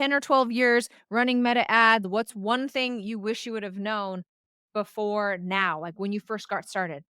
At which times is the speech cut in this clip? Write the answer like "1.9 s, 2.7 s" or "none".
2.1 s

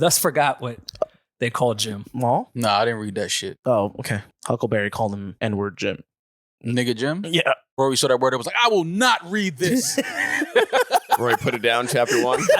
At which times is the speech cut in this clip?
2.5 s, 4.2 s, 5.3 s, 7.8 s

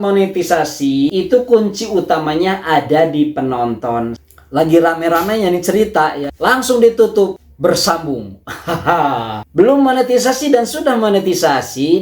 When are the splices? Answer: 1.1 s, 4.2 s, 9.4 s

